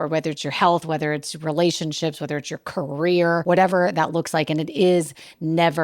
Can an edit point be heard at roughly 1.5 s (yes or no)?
no